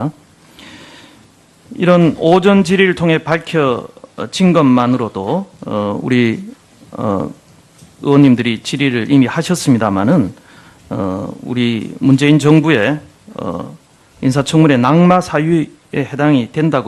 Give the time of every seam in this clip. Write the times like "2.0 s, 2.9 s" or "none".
11.8 s